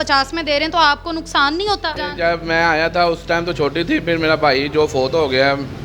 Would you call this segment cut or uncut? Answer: cut